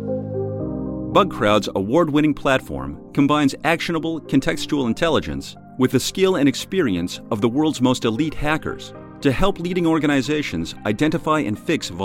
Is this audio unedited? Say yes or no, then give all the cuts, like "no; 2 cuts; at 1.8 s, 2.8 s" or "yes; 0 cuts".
no; 1 cut; at 0.9 s